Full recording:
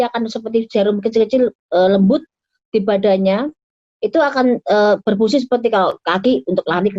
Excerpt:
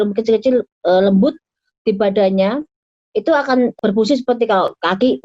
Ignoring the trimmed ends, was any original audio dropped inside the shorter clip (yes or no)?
yes